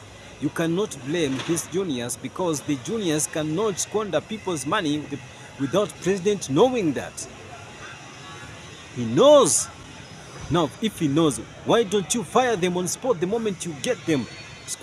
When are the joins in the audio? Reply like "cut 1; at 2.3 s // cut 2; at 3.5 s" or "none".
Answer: none